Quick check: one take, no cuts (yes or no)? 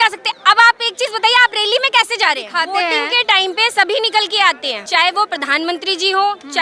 no